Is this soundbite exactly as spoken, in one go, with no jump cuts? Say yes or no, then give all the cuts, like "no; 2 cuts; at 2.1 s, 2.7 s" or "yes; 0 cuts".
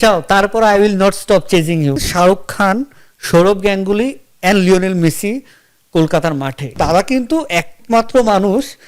no; 2 cuts; at 2.0 s, 6.7 s